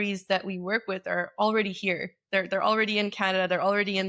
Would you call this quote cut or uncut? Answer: uncut